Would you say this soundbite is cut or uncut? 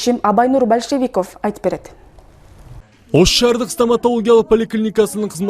uncut